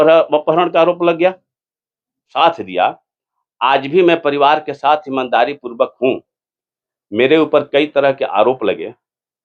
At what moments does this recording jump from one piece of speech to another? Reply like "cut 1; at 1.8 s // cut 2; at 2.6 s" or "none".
cut 1; at 2.3 s